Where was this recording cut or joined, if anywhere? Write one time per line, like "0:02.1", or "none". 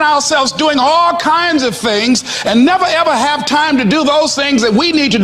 none